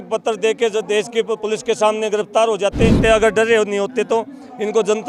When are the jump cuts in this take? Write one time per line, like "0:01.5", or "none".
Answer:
0:03.0